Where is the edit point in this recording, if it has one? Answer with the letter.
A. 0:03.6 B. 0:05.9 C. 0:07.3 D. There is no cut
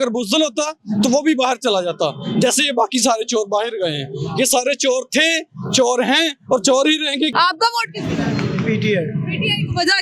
C